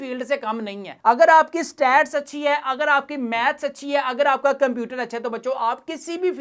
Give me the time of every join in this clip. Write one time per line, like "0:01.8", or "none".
none